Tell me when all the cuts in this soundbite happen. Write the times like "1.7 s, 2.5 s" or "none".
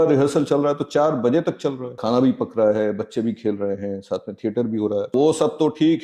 2.0 s, 5.1 s